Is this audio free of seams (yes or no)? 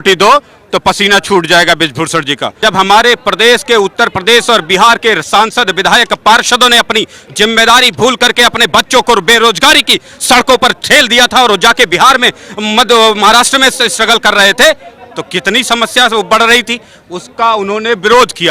no